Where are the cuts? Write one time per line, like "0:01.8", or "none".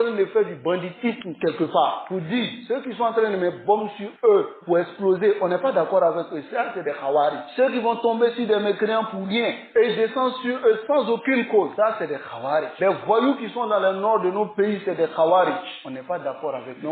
0:02.6